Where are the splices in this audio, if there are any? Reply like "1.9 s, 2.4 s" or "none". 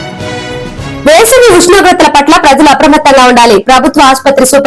1.0 s